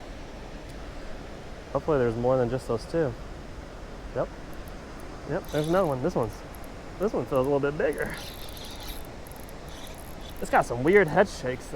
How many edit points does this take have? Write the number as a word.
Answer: two